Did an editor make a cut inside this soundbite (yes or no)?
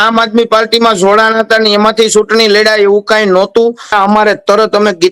yes